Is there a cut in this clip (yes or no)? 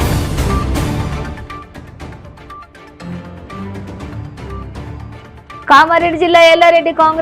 yes